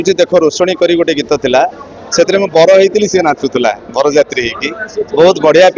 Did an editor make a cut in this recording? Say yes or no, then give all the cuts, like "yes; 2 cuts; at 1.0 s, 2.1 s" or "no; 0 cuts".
no; 0 cuts